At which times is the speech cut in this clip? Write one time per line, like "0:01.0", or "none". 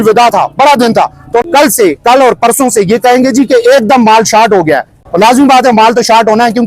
0:01.4